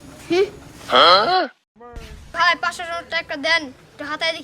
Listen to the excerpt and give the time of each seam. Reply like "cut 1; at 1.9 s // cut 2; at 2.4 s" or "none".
cut 1; at 2.3 s